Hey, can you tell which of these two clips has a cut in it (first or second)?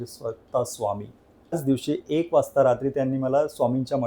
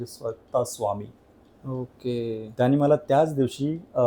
first